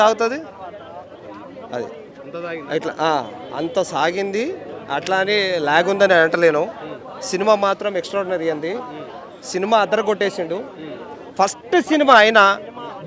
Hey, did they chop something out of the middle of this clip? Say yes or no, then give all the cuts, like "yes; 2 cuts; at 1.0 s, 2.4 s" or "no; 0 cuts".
no; 0 cuts